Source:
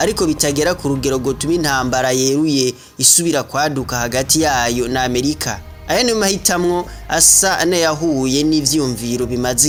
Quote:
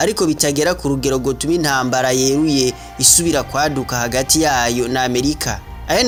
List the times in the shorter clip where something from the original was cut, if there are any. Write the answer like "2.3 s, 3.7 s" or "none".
none